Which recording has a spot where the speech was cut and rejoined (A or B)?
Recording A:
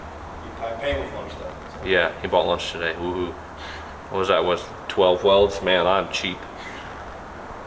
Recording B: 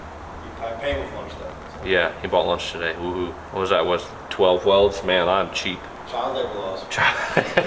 B